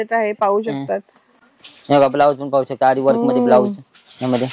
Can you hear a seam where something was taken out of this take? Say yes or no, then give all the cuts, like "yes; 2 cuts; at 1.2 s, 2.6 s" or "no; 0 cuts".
no; 0 cuts